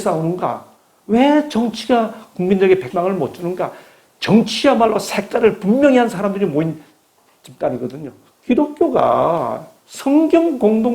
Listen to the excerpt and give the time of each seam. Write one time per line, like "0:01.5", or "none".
0:02.9
0:08.2